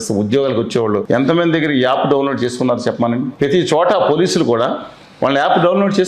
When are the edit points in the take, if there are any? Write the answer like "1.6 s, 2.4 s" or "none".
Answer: 1.0 s, 3.3 s

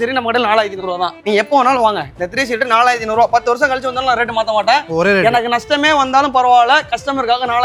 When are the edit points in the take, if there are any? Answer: none

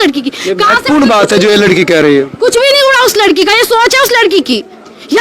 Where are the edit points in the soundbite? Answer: none

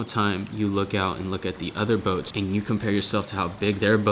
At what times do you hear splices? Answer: 2.3 s

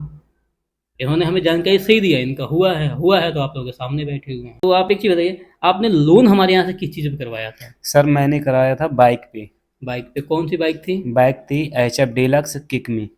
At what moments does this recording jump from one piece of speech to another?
4.6 s

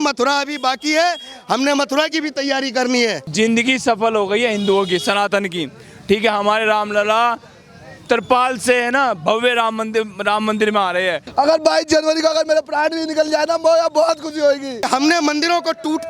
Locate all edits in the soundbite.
3.2 s, 11.2 s, 14.9 s

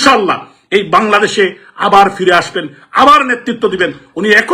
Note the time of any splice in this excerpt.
none

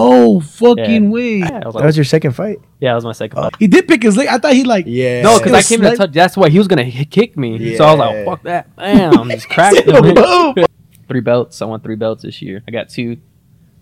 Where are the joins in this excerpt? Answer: 1.5 s, 3.5 s, 10.7 s

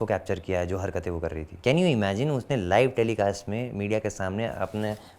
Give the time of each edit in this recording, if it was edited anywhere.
1.5 s

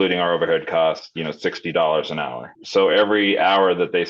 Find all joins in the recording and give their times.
2.5 s

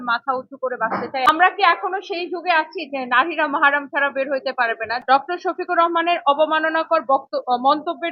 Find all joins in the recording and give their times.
1.3 s, 5.0 s

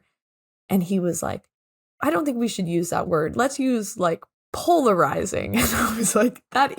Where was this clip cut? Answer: 3.0 s

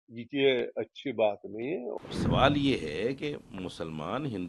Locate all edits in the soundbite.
1.9 s

